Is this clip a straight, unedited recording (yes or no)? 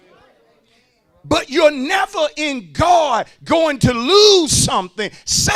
yes